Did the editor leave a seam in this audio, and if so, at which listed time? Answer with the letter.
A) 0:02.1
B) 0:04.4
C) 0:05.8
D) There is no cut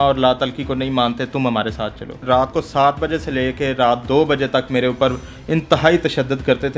A